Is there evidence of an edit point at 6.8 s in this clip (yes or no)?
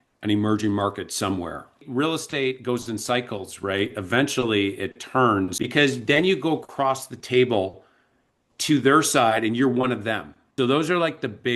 no